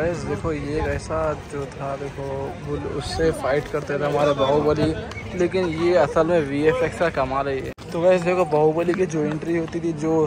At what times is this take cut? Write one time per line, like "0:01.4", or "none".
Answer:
0:07.8